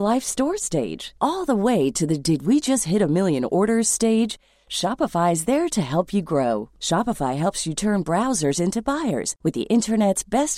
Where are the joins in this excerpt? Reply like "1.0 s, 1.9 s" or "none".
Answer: none